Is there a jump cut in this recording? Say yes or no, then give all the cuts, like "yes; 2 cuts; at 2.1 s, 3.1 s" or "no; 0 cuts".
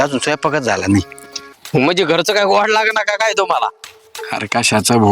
yes; 1 cut; at 1.6 s